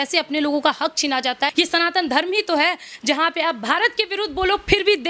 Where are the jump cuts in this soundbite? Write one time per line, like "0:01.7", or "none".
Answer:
0:01.5